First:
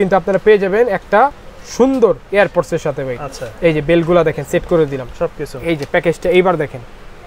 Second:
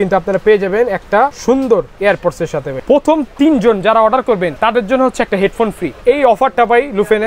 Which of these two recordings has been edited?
second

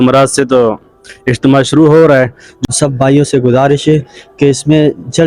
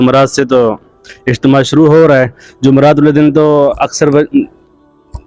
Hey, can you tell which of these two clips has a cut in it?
first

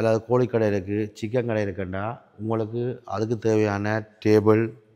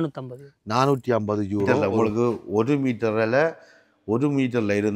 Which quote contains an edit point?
second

